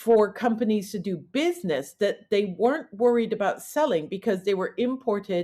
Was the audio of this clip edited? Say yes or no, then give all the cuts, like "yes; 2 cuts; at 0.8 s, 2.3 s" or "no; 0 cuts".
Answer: no; 0 cuts